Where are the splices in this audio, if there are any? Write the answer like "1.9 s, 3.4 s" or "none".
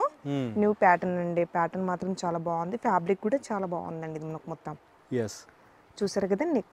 none